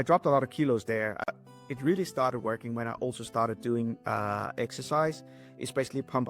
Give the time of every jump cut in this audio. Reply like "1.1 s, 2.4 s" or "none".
1.3 s